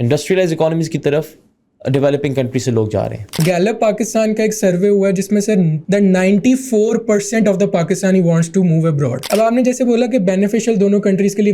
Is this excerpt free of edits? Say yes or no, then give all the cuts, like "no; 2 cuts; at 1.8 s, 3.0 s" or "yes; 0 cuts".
no; 3 cuts; at 3.4 s, 5.8 s, 9.2 s